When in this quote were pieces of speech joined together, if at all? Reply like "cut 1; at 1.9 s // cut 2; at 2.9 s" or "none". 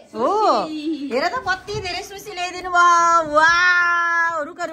none